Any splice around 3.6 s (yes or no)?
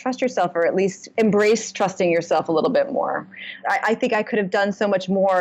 yes